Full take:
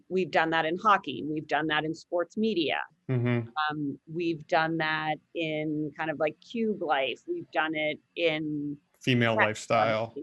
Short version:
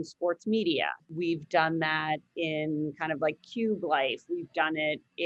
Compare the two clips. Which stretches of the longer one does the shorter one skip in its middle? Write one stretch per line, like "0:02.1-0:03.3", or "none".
0:02.9-0:04.0